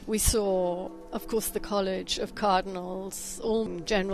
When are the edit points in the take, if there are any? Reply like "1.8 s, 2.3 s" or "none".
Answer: 1.0 s